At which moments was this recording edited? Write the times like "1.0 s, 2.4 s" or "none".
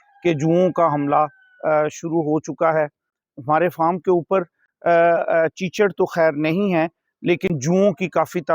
none